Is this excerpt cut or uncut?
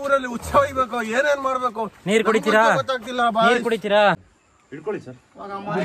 cut